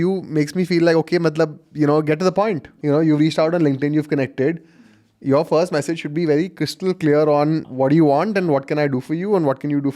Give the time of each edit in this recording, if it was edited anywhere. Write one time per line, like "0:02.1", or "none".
0:02.7
0:07.7